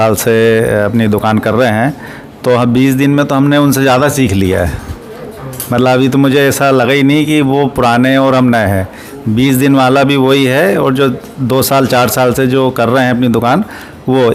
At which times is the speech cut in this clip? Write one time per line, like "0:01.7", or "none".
none